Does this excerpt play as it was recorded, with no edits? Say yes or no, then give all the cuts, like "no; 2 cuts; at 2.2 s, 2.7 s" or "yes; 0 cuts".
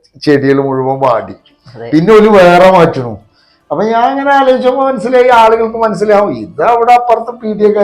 yes; 0 cuts